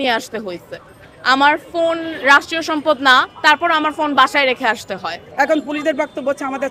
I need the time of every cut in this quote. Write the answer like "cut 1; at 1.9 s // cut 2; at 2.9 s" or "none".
cut 1; at 5.2 s

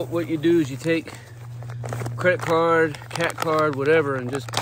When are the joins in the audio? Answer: none

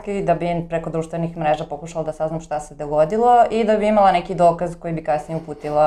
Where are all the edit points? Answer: none

